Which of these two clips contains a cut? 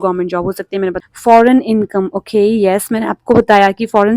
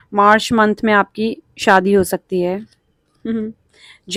first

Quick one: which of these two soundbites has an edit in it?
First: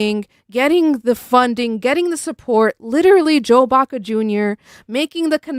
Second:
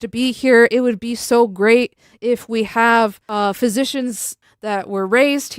second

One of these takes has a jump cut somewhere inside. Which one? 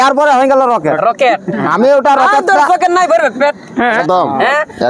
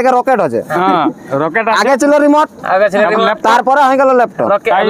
first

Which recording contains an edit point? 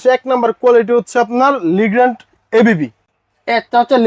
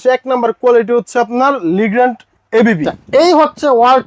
second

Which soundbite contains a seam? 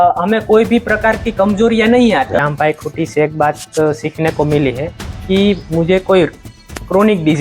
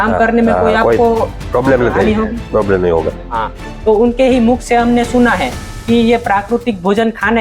first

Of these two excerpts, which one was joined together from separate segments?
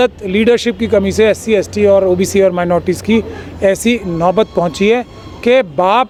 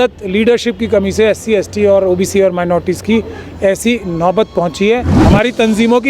second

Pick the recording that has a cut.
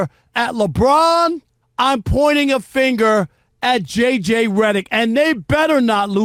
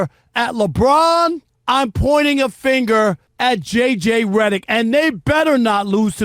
second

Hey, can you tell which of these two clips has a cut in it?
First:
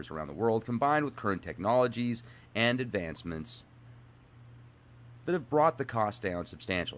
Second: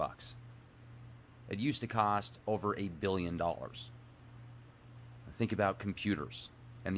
second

